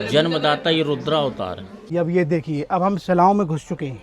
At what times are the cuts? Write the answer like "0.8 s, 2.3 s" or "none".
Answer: 1.9 s